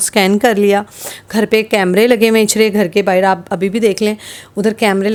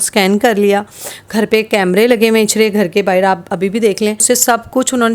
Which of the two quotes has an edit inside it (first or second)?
second